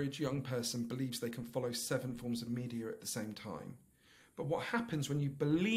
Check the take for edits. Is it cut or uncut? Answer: uncut